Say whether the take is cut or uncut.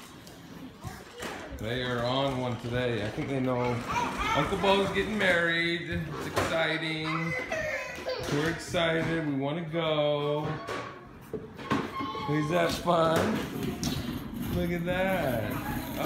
uncut